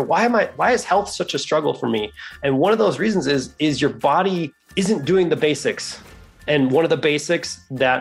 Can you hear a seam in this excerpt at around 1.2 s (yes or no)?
no